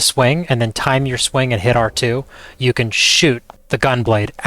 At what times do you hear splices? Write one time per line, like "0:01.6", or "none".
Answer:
0:03.5